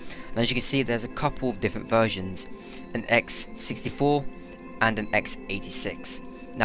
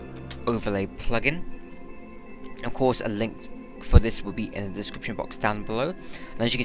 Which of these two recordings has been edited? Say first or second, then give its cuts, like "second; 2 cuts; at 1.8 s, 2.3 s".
second; 1 cut; at 4.5 s